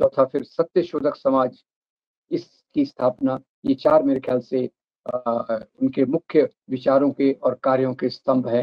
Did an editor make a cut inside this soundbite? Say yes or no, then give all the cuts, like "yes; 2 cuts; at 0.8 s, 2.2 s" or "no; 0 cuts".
no; 0 cuts